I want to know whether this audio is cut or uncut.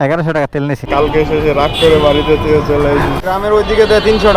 cut